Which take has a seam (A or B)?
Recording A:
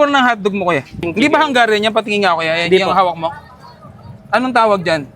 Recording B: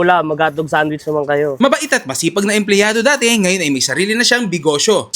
B